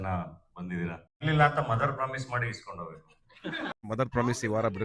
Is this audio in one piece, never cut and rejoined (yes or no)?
no